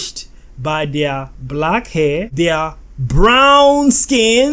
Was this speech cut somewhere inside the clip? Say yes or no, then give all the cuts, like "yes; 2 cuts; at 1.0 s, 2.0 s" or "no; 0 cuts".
yes; 1 cut; at 2.3 s